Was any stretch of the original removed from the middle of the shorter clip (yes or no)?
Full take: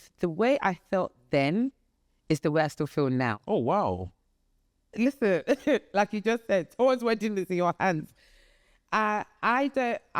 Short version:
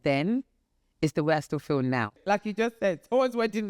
yes